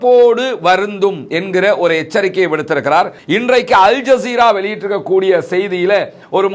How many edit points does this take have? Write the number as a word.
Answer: one